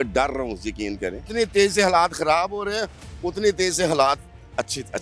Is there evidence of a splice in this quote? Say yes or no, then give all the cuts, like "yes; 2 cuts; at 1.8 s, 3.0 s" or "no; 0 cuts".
yes; 1 cut; at 1.2 s